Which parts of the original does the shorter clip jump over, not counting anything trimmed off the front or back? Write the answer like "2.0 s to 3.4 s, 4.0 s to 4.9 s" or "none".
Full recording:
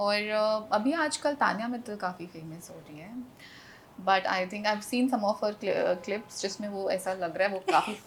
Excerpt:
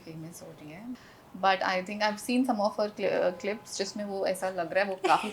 3.4 s to 3.8 s

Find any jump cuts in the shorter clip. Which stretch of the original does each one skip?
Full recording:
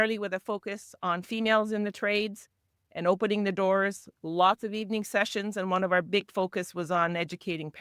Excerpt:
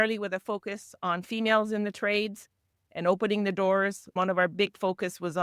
4.1 s to 5.7 s

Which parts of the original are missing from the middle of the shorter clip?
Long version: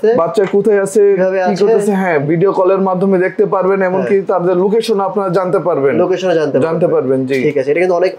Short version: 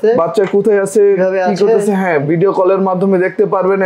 none

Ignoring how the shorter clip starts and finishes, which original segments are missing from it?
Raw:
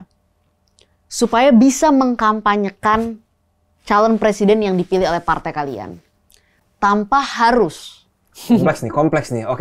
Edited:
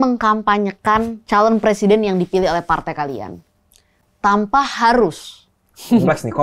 3.1 s to 3.7 s

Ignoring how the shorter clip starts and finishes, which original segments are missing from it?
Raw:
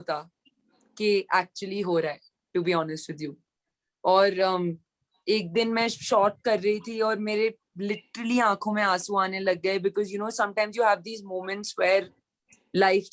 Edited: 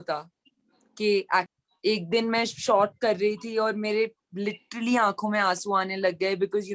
1.6 s to 5.0 s

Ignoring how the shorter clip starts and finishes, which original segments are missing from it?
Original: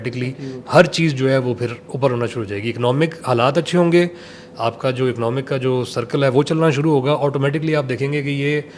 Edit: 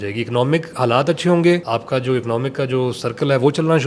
4.1 s to 4.6 s

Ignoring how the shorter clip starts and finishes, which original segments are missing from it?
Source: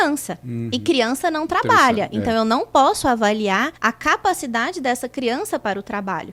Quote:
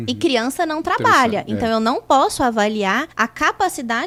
none

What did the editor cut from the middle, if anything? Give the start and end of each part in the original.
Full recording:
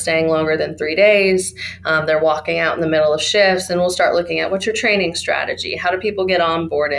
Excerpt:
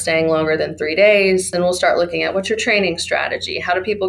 1.5 s to 3.7 s

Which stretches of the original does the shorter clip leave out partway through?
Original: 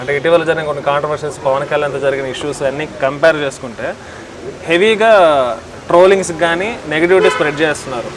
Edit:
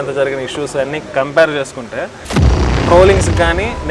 4.5 s to 5.7 s

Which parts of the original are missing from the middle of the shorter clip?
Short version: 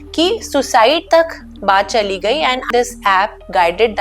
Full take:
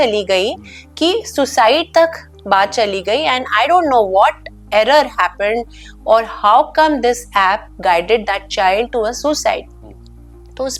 3.5 s to 7.0 s

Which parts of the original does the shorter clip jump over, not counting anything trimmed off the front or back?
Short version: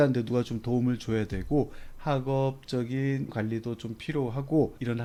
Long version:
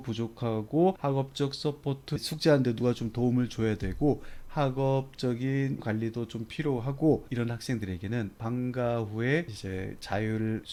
none

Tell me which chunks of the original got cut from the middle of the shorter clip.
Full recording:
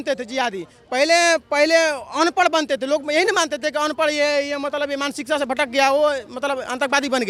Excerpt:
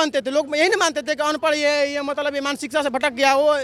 none

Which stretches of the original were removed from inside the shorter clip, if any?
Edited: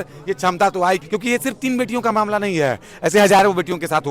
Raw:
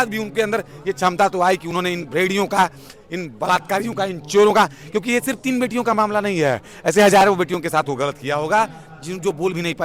1.6 s to 4.9 s

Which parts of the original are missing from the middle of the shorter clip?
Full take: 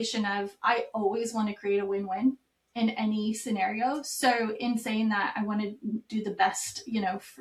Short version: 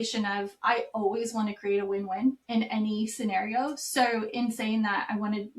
2.4 s to 2.7 s

